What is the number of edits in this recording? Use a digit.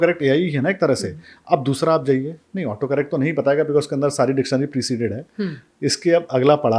0